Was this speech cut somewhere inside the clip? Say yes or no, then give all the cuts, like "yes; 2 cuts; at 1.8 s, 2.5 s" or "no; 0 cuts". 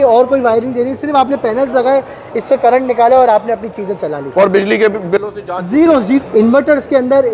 yes; 1 cut; at 6.2 s